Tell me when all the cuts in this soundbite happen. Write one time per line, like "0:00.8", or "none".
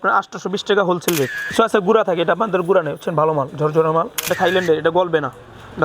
0:01.4
0:04.3